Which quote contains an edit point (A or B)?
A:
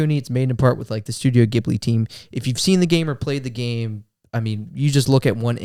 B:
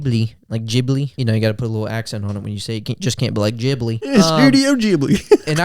B